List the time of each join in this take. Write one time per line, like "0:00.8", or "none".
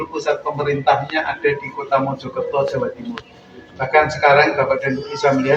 none